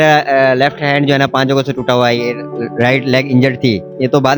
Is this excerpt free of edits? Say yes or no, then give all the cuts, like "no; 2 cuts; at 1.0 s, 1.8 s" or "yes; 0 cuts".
yes; 0 cuts